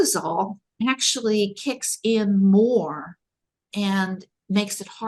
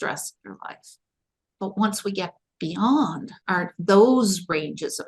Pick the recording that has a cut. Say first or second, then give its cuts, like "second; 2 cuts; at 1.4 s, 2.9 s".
second; 1 cut; at 3.3 s